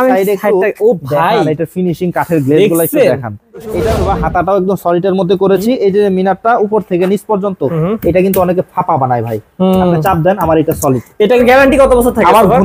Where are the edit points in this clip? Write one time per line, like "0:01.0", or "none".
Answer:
0:03.7
0:11.4